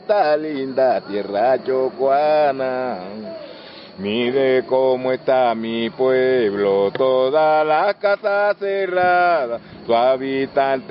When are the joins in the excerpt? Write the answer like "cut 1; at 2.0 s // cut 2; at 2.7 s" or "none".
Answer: none